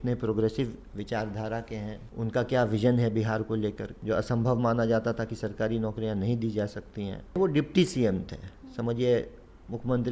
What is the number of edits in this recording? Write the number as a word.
three